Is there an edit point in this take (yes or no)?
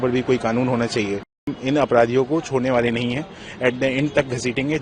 yes